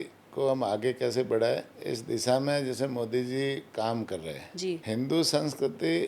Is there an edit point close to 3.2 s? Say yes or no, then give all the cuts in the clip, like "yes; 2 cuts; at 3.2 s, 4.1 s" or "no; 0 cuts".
no; 2 cuts; at 1.7 s, 4.8 s